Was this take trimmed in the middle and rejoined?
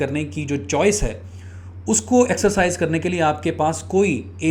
no; 0 cuts

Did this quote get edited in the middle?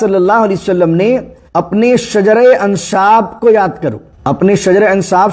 yes; 2 cuts; at 1.4 s, 4.1 s

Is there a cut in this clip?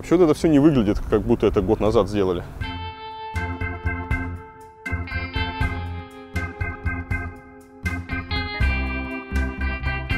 no; 0 cuts

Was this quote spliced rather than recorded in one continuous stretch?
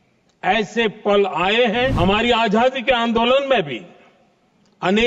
yes; 1 cut; at 1.9 s

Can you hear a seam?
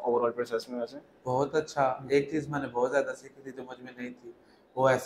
no; 0 cuts

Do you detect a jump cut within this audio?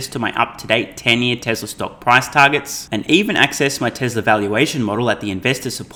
no; 0 cuts

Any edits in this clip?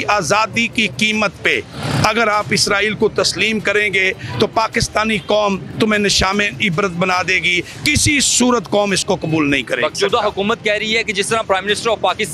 yes; 1 cut; at 9.9 s

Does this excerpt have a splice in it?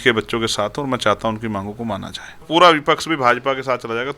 yes; 1 cut; at 2.5 s

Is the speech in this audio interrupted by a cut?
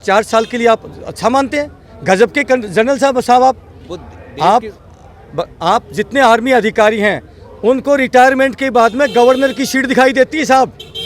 no; 0 cuts

